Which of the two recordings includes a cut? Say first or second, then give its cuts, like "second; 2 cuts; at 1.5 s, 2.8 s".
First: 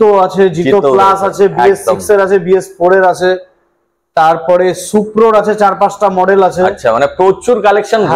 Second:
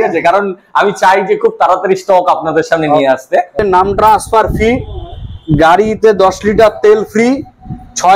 second; 1 cut; at 3.6 s